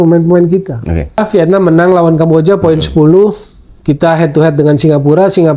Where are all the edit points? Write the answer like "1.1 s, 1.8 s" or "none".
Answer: 1.2 s